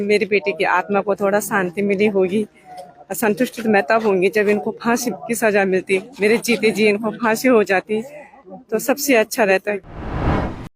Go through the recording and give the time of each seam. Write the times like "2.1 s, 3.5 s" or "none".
9.8 s